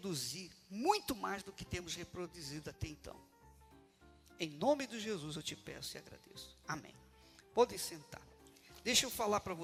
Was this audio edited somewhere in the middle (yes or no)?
no